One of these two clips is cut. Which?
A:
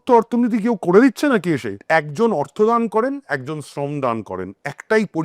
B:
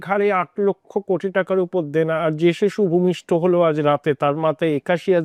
A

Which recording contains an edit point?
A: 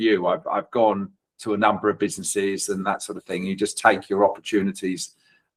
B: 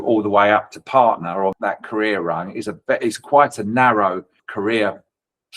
B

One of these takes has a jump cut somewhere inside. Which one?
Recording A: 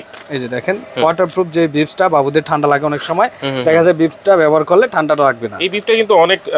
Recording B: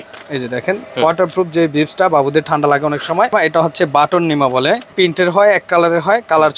B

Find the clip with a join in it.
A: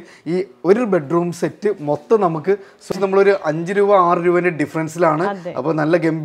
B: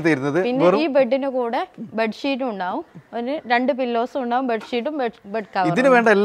A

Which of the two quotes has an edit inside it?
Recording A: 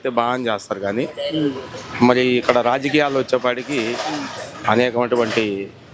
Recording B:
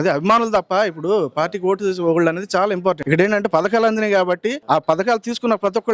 B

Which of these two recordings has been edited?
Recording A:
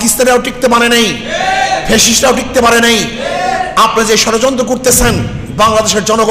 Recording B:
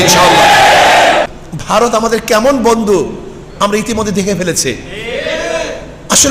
B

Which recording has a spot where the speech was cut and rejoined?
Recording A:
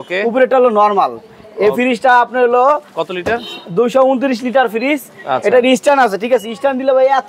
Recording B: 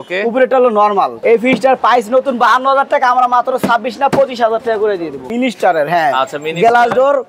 B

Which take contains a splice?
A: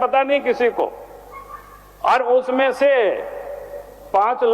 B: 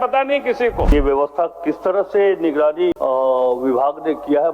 B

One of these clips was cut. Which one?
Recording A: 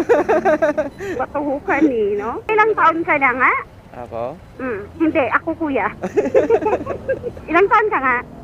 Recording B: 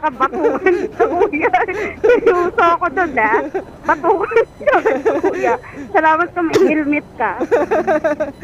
A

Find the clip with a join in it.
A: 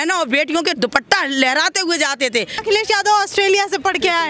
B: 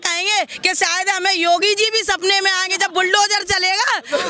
A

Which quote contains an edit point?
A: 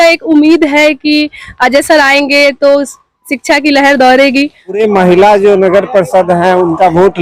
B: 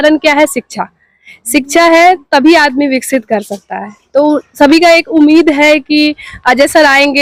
A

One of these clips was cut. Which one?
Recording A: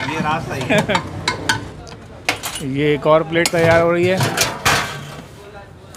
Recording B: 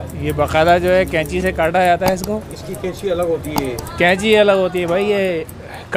A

